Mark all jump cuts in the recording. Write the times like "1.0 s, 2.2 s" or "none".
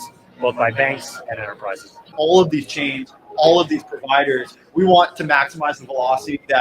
2.1 s